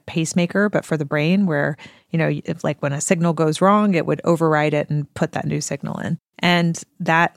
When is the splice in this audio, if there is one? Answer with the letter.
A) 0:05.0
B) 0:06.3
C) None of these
B